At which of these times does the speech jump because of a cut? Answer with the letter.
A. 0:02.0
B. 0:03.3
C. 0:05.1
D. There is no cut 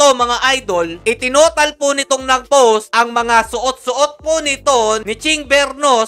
D